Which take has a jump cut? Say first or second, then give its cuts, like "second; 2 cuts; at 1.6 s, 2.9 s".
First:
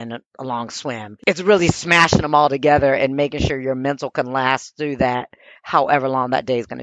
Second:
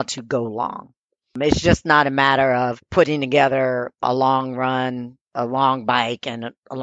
second; 3 cuts; at 2.8 s, 4.0 s, 5.3 s